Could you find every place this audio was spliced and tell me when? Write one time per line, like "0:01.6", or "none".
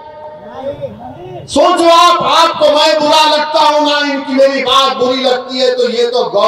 none